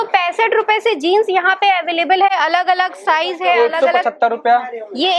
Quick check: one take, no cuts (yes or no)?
yes